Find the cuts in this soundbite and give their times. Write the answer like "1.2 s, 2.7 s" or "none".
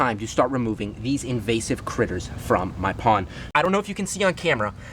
3.6 s